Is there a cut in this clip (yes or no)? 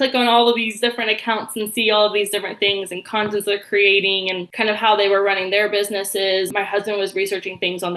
yes